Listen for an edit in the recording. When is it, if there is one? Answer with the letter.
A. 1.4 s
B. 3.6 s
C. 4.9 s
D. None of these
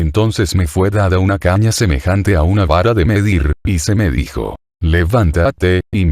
A